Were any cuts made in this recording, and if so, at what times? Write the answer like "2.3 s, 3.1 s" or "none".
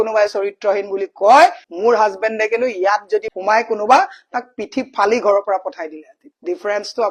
none

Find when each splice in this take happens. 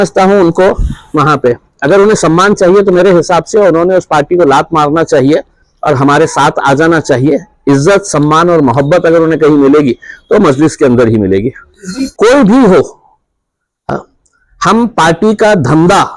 12.1 s

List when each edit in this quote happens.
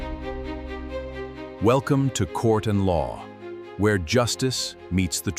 none

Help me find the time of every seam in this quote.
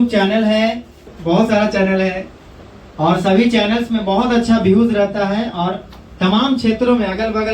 1.1 s

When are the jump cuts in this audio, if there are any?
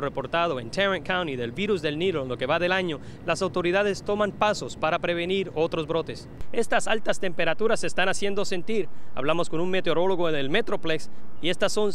6.4 s

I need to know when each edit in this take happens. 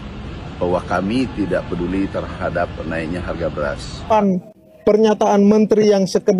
4.0 s

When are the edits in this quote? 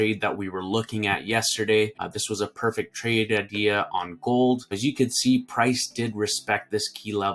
2.1 s, 4.7 s

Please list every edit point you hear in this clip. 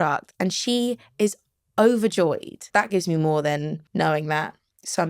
2.6 s, 3.8 s

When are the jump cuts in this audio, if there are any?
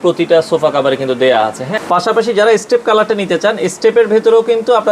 1.7 s

